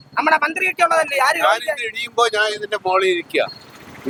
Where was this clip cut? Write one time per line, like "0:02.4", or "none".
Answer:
none